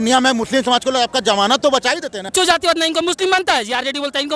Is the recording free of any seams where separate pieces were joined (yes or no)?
no